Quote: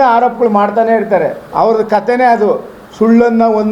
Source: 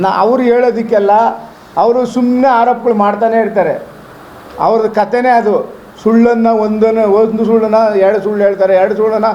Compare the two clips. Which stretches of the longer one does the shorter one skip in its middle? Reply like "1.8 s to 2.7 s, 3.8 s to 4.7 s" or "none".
3.9 s to 4.5 s

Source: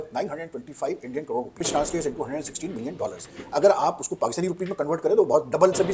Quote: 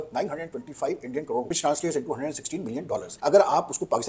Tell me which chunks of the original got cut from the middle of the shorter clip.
1.5 s to 1.6 s, 3.2 s to 3.4 s

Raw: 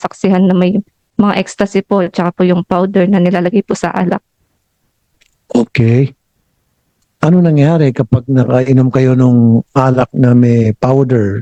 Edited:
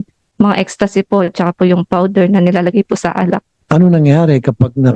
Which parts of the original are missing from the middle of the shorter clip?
4.3 s to 7.0 s

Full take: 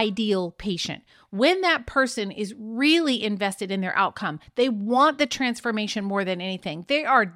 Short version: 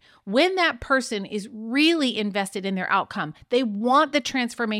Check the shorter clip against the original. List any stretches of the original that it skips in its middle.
none

